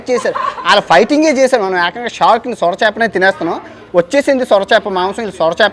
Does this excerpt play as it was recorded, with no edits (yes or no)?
yes